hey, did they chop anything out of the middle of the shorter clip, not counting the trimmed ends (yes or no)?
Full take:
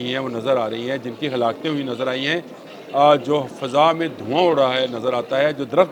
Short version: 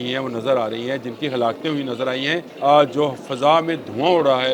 yes